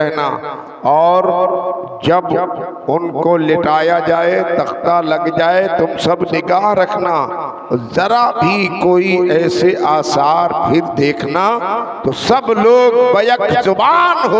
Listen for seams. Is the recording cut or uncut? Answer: uncut